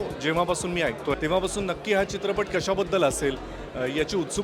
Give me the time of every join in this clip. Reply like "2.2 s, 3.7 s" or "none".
1.1 s